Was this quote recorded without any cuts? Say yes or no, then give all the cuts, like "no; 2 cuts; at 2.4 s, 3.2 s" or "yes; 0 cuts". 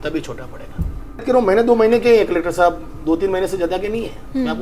no; 1 cut; at 1.2 s